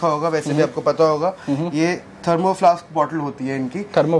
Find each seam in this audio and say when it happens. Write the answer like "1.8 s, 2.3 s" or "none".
none

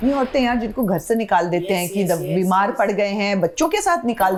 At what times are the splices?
none

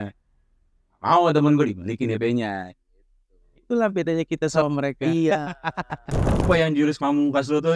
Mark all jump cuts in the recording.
6.4 s

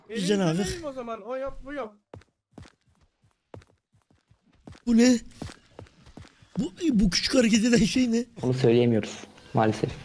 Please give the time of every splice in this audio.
8.4 s

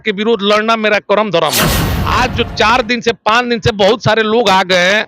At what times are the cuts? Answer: 1.9 s

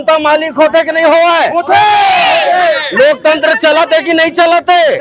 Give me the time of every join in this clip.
none

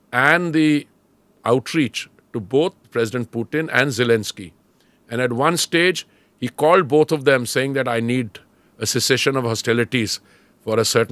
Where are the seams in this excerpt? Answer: 2.8 s

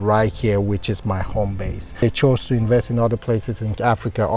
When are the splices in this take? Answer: 2.0 s

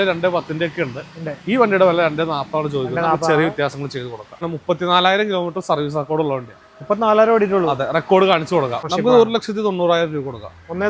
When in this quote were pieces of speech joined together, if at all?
4.4 s, 8.9 s

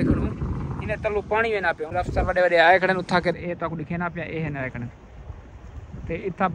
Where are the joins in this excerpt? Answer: 1.9 s

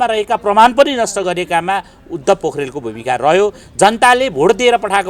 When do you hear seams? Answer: 3.6 s

